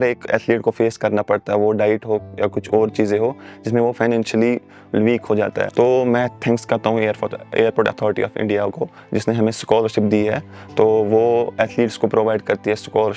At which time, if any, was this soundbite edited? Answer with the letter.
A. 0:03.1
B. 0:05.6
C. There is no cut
B